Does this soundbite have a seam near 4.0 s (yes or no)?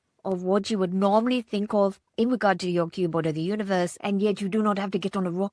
yes